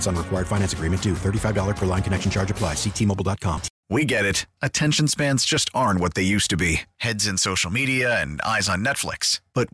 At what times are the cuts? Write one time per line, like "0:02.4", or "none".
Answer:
0:03.7